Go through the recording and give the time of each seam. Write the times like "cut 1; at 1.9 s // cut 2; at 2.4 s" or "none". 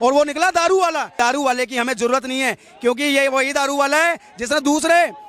cut 1; at 1.1 s